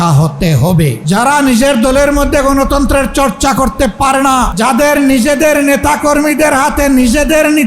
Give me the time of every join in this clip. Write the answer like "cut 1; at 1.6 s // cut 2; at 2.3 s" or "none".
cut 1; at 1.0 s // cut 2; at 4.5 s